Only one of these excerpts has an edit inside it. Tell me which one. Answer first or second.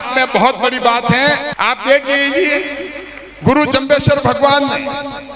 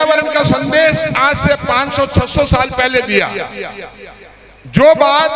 first